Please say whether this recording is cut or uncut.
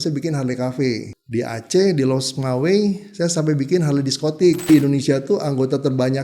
cut